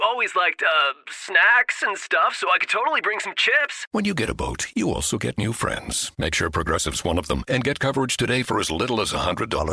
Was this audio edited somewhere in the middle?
yes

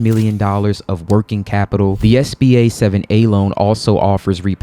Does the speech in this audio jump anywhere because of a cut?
yes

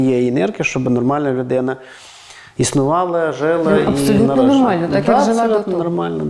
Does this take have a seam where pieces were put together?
no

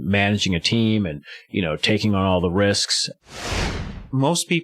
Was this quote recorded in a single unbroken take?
no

